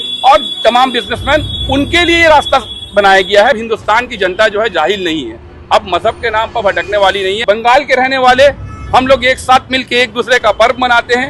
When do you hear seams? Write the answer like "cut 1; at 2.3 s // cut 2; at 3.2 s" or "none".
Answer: cut 1; at 3.6 s // cut 2; at 7.4 s